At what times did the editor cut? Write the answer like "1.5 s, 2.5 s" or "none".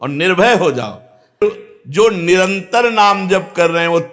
1.4 s